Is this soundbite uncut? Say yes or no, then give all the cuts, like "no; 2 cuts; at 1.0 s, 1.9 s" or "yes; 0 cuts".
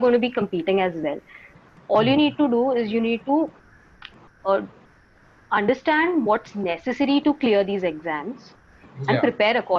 yes; 0 cuts